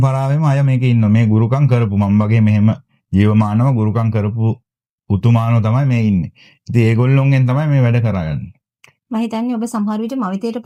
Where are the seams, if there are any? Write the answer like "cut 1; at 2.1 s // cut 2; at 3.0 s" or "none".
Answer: none

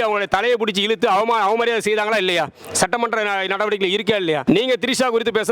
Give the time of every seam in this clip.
cut 1; at 4.4 s

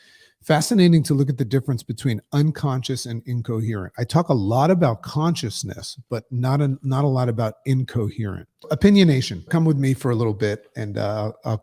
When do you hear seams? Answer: cut 1; at 8.7 s // cut 2; at 9.5 s

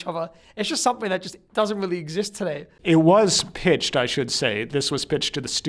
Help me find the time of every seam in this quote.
cut 1; at 2.7 s

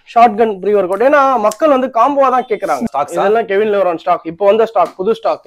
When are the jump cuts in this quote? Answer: cut 1; at 2.9 s

